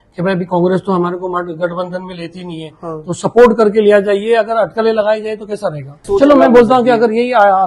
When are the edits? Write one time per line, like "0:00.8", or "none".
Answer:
0:06.0